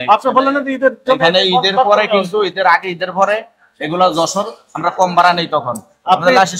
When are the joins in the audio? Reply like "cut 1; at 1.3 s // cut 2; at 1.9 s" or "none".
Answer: none